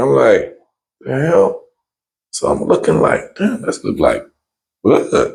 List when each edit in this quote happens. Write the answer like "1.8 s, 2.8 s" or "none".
none